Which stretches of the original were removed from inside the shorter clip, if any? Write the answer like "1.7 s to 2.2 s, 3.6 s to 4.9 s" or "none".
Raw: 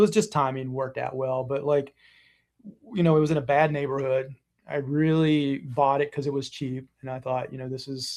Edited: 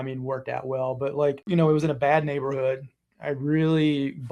1.9 s to 2.9 s